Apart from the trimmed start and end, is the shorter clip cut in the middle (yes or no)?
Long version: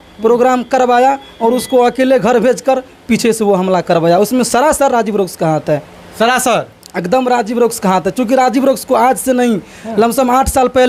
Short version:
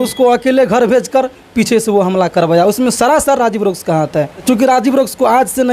yes